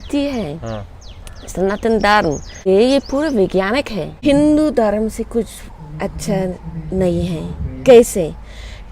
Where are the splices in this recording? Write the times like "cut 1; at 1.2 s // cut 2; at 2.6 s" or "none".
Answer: cut 1; at 2.7 s // cut 2; at 4.0 s